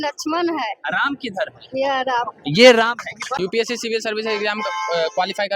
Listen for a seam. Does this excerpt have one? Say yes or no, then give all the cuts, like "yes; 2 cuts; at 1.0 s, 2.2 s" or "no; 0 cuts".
yes; 1 cut; at 3.4 s